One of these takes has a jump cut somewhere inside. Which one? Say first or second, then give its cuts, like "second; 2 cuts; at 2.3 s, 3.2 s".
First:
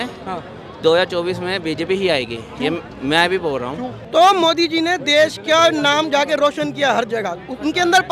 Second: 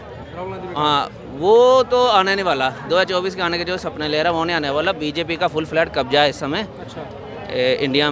first; 1 cut; at 4.0 s